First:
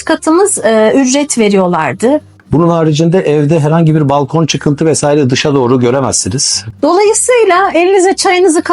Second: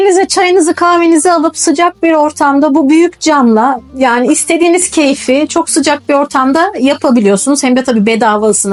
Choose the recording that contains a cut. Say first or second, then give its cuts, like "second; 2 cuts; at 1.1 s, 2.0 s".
first; 2 cuts; at 2.4 s, 6.7 s